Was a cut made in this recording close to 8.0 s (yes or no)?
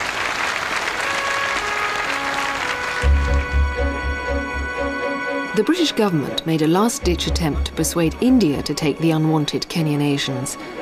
no